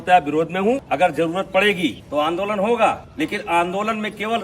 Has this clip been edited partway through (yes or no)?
yes